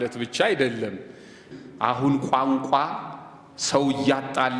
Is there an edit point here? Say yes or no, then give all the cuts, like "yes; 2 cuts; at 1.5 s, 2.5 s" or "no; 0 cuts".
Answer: yes; 1 cut; at 1.4 s